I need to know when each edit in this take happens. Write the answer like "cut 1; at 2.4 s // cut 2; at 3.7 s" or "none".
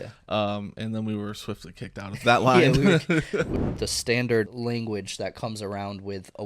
cut 1; at 3.5 s // cut 2; at 4.5 s